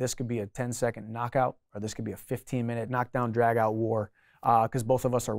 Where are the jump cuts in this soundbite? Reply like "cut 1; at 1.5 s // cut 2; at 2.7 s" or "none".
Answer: cut 1; at 2.9 s